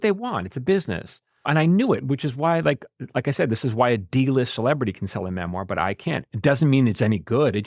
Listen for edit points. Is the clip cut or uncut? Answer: cut